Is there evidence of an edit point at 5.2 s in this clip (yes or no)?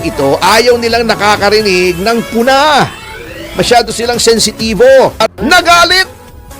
yes